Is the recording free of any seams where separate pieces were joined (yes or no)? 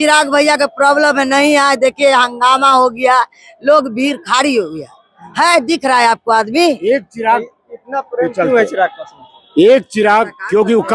yes